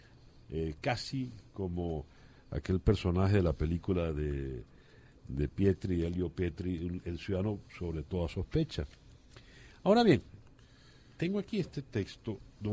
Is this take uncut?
yes; 0 cuts

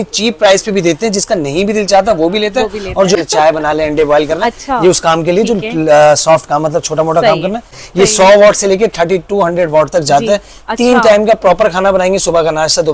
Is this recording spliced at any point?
yes; 2 cuts; at 3.2 s, 7.8 s

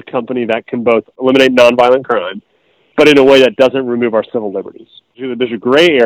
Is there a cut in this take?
yes; 1 cut; at 1.1 s

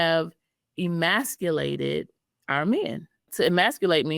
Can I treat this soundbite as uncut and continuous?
no; 1 cut; at 3.3 s

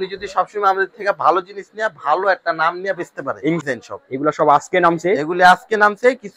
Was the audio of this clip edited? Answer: yes; 1 cut; at 3.6 s

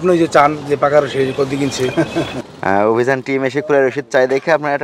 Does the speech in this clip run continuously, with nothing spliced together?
no; 1 cut; at 2.4 s

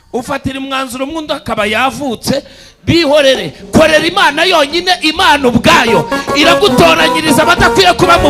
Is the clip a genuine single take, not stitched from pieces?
yes; 0 cuts

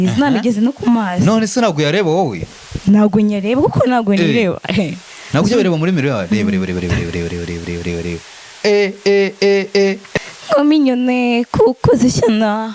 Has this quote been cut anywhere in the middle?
yes; 1 cut; at 10.1 s

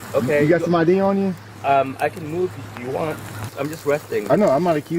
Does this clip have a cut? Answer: yes; 2 cuts; at 1.5 s, 3.5 s

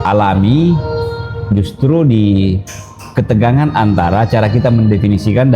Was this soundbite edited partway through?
no; 0 cuts

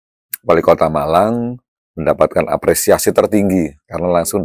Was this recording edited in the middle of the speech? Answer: no; 0 cuts

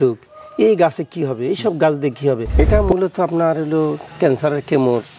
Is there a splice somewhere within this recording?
yes; 1 cut; at 2.5 s

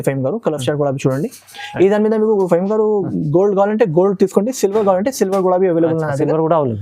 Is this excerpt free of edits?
yes; 0 cuts

